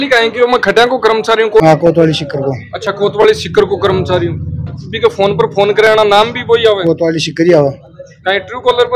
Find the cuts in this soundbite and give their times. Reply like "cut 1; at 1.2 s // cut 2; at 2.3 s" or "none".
cut 1; at 4.7 s